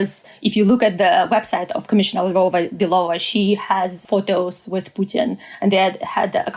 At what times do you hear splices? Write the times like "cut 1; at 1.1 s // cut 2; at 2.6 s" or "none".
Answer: cut 1; at 4.0 s